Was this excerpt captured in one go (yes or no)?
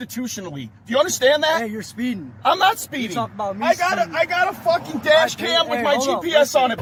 yes